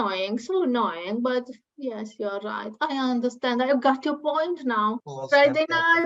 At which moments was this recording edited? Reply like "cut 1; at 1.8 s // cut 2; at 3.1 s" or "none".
cut 1; at 5.0 s

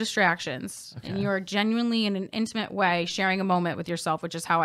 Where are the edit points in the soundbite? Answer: none

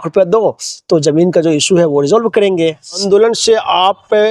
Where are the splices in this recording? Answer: cut 1; at 3.0 s

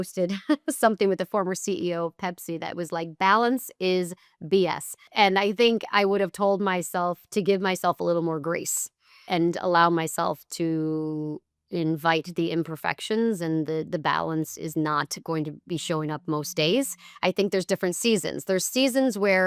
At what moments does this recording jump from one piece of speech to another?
cut 1; at 5.0 s

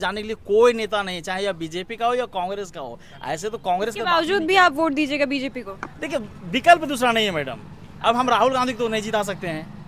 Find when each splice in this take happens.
none

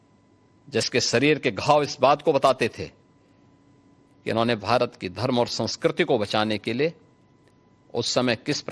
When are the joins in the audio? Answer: none

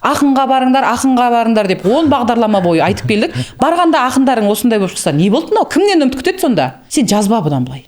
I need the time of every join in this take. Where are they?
cut 1; at 6.8 s

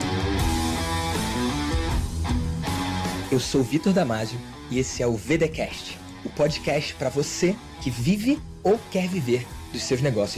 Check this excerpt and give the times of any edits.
none

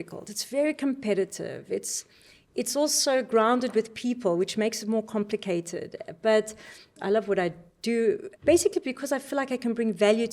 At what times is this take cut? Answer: cut 1; at 6.9 s // cut 2; at 8.3 s

